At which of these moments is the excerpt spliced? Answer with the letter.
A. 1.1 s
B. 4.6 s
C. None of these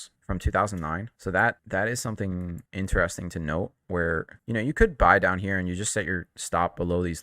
C